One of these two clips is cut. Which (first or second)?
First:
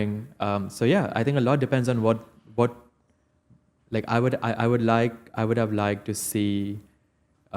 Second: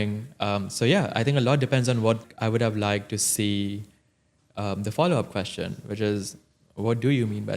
second